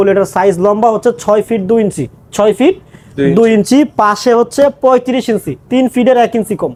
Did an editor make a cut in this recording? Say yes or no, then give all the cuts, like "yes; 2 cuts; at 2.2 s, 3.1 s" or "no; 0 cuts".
no; 0 cuts